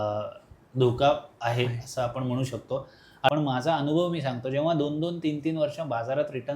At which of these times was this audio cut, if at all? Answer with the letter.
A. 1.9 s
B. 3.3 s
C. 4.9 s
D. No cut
B